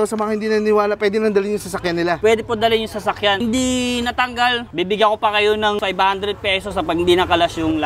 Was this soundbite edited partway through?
yes; 2 cuts; at 3.4 s, 5.8 s

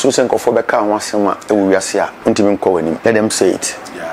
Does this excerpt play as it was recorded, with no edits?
no; 2 cuts; at 2.1 s, 3.0 s

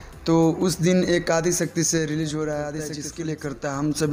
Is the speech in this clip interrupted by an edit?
yes; 1 cut; at 3.0 s

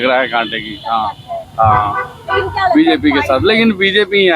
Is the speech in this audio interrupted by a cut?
no; 0 cuts

